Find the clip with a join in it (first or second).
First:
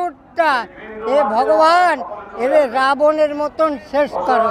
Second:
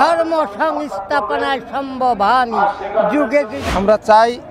second